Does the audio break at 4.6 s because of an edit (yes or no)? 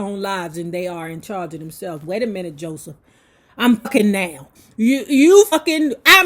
yes